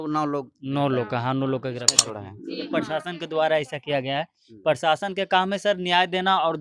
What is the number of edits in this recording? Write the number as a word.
one